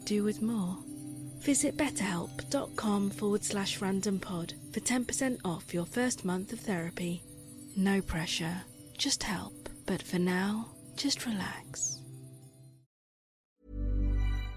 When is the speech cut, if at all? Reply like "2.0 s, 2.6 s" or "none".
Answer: 13.4 s